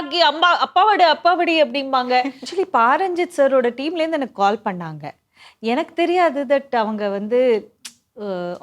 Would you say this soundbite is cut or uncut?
cut